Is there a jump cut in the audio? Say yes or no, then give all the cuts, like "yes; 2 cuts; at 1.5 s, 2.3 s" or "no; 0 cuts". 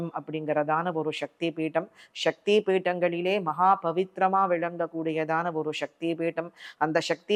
no; 0 cuts